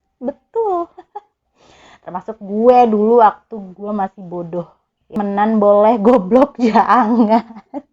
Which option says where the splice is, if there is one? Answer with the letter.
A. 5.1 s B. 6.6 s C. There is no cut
A